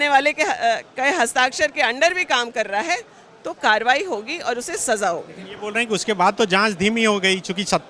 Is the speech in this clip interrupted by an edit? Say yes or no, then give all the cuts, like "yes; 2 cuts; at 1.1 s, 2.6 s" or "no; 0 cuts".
no; 0 cuts